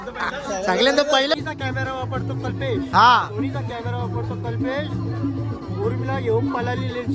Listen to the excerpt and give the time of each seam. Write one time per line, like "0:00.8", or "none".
0:01.3

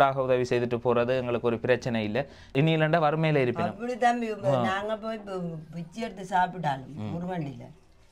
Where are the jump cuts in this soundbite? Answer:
0:02.5

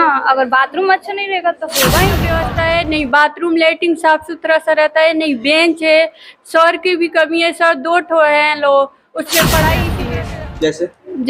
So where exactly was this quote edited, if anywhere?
0:02.3
0:10.0

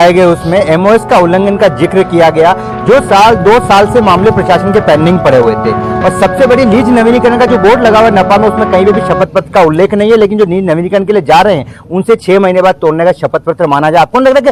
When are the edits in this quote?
none

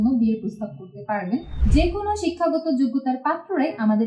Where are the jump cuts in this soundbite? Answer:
0:01.6

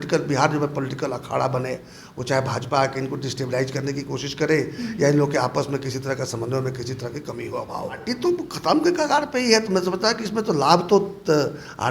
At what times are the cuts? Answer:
0:08.1

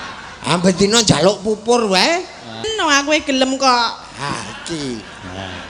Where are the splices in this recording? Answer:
0:02.7

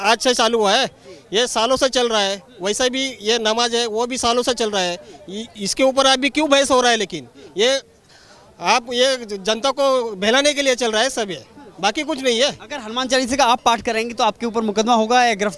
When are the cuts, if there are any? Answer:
none

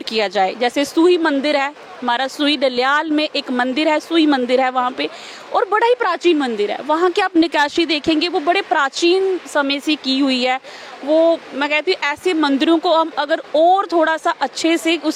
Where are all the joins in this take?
none

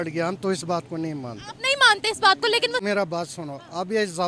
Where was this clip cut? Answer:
0:02.8

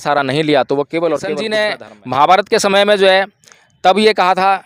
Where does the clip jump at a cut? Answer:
0:01.4

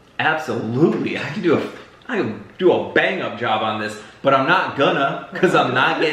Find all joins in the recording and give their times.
none

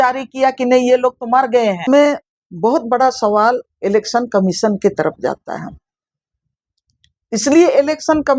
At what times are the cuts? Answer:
0:01.8

